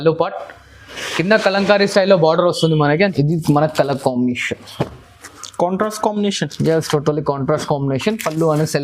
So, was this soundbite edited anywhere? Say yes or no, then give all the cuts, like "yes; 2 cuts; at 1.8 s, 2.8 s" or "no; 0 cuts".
yes; 1 cut; at 3.0 s